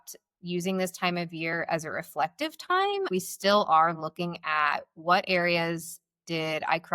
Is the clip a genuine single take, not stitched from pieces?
no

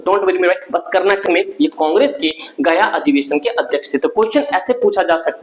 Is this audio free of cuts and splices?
no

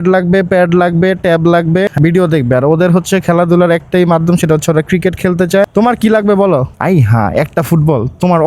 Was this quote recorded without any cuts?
no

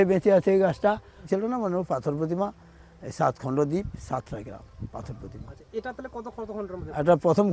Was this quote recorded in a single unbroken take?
no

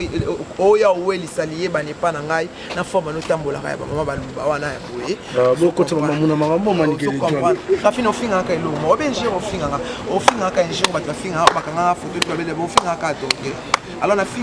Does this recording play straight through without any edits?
no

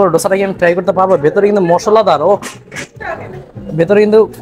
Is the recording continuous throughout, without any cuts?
yes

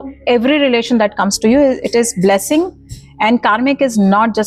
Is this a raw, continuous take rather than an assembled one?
yes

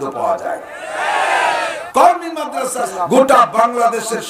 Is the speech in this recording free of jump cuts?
no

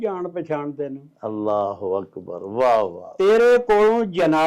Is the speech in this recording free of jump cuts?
yes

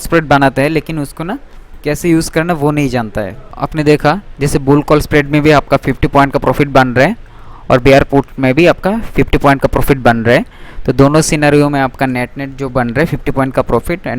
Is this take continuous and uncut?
no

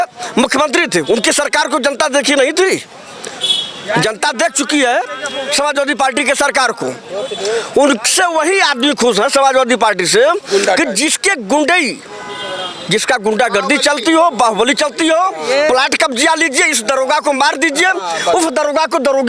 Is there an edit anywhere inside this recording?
no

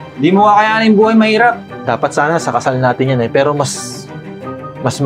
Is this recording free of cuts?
no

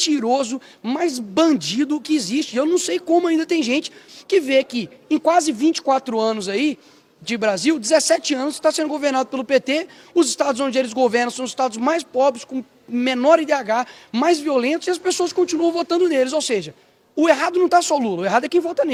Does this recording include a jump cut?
no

